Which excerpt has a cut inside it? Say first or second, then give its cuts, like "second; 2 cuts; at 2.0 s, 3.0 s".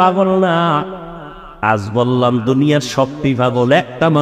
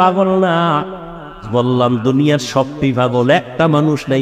second; 1 cut; at 1.4 s